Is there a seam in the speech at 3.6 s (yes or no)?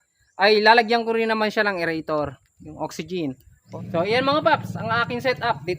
yes